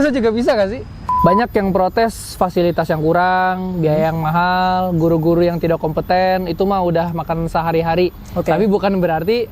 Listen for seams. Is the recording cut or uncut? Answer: cut